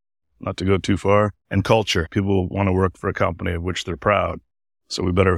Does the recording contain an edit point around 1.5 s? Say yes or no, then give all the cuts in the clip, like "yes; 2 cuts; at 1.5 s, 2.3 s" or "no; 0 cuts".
no; 0 cuts